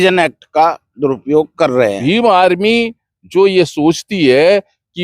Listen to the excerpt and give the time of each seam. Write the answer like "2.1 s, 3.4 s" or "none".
2.0 s